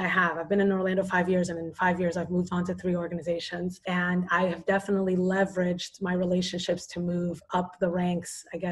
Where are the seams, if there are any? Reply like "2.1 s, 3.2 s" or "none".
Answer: 3.8 s